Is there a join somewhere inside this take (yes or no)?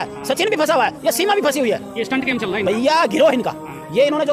no